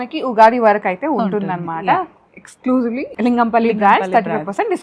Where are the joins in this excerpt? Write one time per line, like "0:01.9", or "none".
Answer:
0:03.1